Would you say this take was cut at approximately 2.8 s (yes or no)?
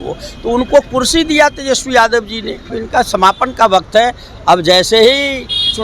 yes